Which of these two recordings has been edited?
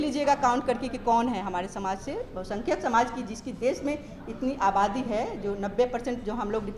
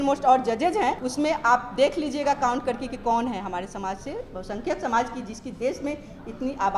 second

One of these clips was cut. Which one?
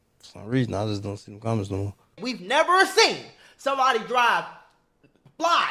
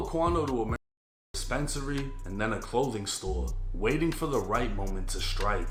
first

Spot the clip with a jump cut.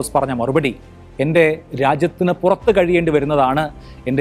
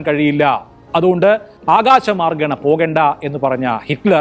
second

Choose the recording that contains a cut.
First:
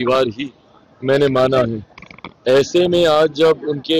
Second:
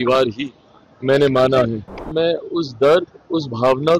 second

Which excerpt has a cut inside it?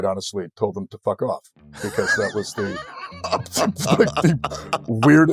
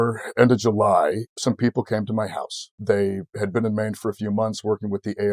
second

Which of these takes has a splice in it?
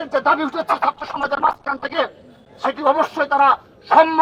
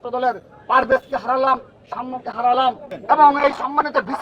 second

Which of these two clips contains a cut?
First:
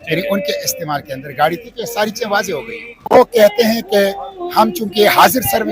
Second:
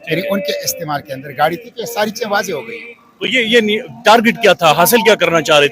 first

